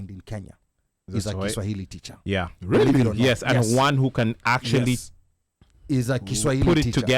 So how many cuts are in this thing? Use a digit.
0